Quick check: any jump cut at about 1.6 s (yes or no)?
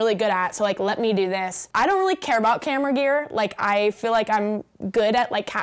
yes